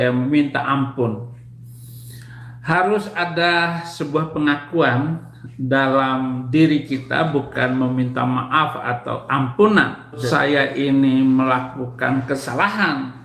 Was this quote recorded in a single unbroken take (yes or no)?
no